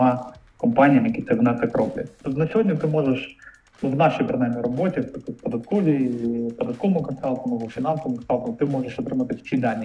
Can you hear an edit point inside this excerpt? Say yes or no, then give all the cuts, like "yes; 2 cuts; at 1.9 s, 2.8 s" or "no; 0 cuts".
yes; 1 cut; at 2.1 s